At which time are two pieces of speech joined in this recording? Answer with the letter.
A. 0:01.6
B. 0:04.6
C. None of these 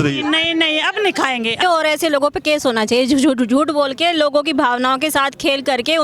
A